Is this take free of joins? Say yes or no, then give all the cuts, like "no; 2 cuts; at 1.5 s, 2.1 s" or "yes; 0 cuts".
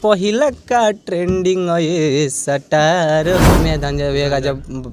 no; 1 cut; at 3.6 s